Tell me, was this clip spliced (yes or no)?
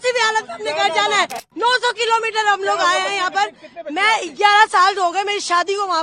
yes